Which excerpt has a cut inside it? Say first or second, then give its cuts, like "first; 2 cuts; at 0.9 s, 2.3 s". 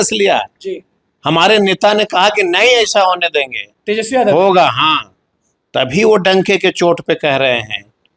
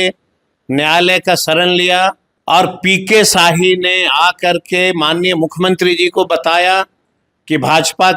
second; 1 cut; at 2.3 s